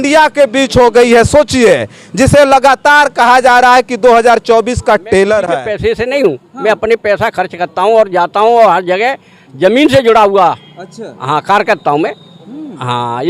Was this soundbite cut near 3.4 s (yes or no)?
no